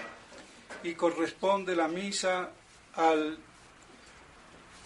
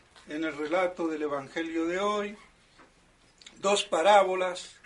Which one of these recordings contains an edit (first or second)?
second